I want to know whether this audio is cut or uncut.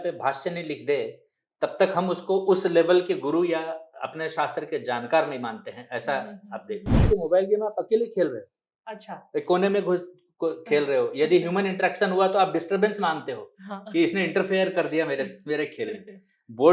cut